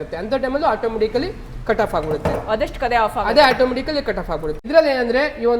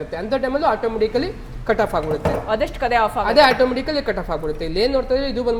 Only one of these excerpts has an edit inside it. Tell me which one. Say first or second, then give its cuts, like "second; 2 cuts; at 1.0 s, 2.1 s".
first; 1 cut; at 4.6 s